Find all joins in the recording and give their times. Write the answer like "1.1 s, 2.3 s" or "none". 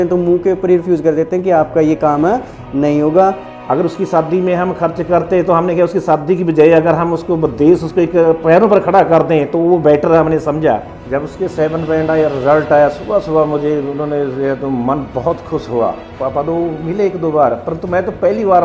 3.5 s, 11.0 s, 16.0 s